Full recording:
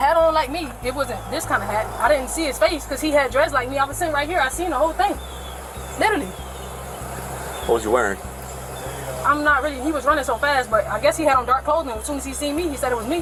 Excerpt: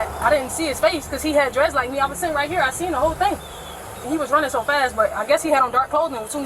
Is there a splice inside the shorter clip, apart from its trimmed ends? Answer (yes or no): yes